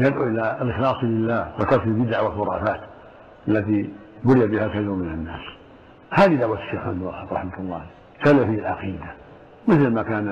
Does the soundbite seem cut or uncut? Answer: uncut